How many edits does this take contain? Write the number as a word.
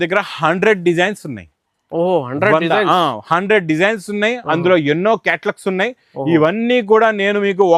zero